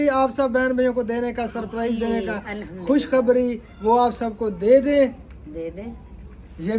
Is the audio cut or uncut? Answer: uncut